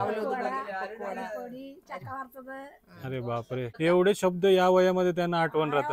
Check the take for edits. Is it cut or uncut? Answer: cut